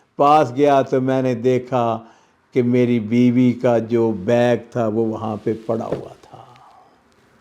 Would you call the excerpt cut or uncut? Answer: uncut